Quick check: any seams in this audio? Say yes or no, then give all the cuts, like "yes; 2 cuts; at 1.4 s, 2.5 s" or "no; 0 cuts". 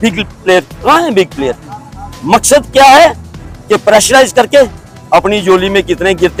no; 0 cuts